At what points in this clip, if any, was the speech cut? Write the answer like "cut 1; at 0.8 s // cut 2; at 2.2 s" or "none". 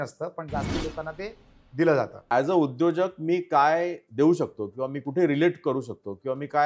cut 1; at 2.2 s